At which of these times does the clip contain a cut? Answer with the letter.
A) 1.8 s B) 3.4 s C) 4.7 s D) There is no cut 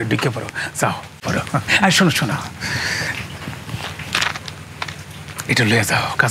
B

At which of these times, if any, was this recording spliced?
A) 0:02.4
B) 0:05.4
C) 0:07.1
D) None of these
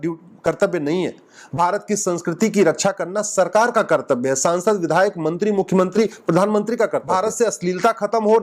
C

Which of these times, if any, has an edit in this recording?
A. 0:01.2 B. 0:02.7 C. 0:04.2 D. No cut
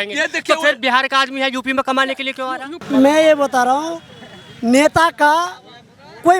B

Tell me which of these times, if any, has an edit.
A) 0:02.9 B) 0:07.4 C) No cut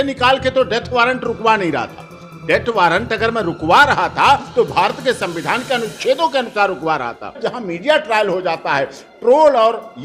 B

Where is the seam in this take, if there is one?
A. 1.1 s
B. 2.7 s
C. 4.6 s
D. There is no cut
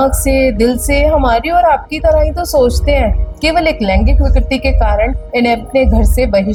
D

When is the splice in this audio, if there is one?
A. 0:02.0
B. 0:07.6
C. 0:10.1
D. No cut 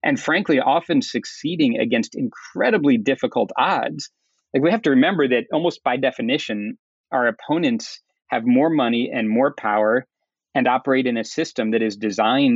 D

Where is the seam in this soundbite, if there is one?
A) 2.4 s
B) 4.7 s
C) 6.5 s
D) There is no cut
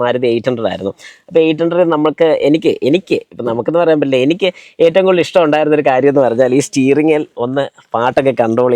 D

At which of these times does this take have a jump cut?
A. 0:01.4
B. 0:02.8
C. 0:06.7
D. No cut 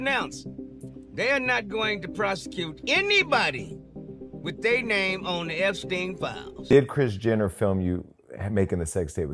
C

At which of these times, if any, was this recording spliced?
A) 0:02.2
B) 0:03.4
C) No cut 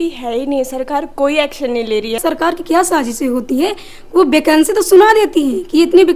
A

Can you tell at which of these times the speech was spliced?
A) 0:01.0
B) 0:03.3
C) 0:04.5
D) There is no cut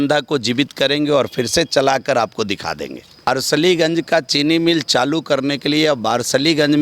B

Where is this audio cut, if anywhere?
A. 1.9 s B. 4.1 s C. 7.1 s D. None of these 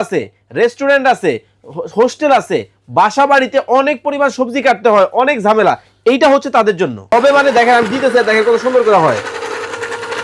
C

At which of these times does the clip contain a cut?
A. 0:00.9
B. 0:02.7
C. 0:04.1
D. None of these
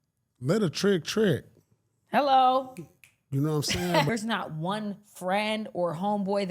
C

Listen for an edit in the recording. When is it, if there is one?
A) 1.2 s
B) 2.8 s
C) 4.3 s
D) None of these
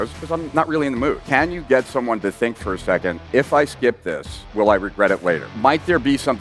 A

